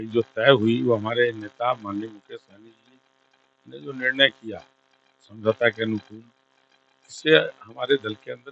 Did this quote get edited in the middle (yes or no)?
no